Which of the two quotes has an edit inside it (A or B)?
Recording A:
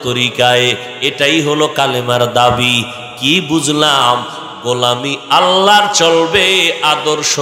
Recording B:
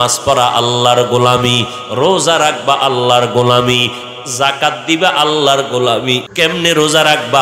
B